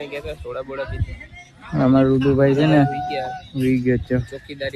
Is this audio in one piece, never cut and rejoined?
yes; 0 cuts

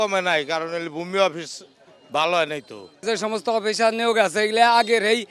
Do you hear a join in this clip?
no; 0 cuts

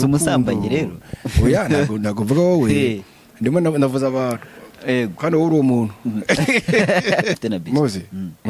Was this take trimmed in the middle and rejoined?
yes; 1 cut; at 7.4 s

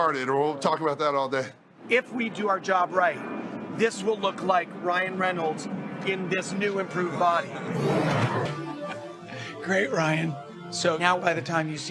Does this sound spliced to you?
yes; 1 cut; at 8.4 s

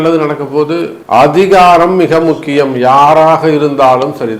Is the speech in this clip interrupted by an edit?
yes; 1 cut; at 0.9 s

